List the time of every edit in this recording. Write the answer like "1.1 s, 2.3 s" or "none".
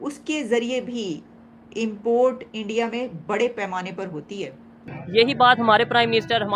4.8 s

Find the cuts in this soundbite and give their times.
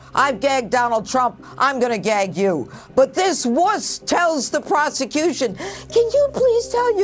none

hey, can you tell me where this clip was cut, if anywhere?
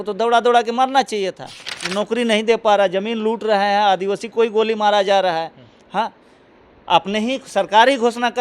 none

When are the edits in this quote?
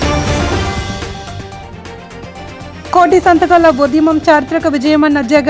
1.4 s

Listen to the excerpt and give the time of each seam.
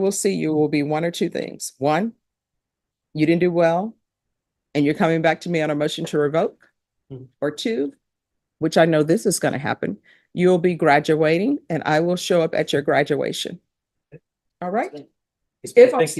none

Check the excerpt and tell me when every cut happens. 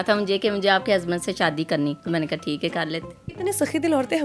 2.0 s

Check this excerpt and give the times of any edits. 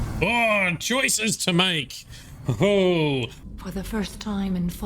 3.4 s

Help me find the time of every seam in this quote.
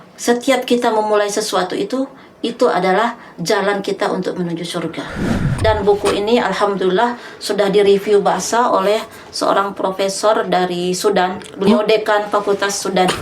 5.6 s

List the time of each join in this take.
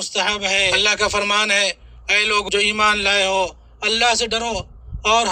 0.8 s, 2.5 s

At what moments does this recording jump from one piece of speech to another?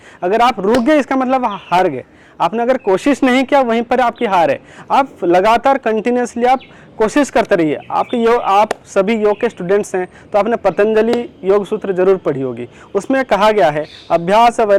none

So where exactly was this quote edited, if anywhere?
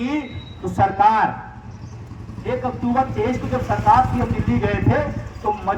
none

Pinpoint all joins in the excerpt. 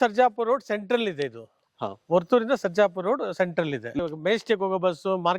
4.0 s

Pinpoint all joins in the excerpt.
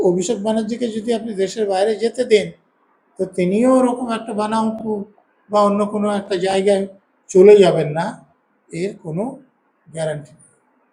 none

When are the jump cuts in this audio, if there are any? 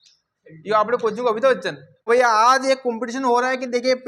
2.1 s

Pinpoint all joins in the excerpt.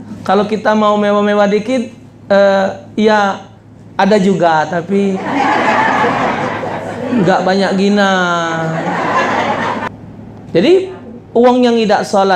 9.9 s

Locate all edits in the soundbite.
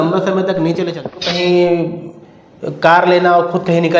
1.1 s

